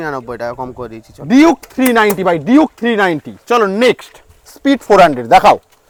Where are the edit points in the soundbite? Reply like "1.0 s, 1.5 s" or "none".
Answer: none